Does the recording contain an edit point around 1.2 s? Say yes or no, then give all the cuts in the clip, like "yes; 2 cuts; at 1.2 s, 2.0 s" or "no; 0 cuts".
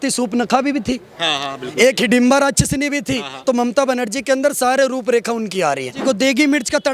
no; 1 cut; at 6.0 s